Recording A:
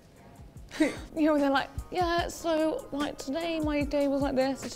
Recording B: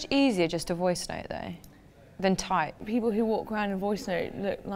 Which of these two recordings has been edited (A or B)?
B